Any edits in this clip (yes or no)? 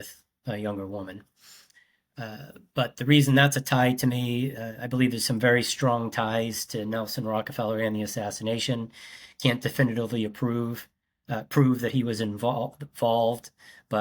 no